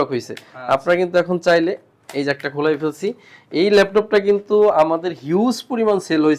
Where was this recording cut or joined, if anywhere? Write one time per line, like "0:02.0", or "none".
none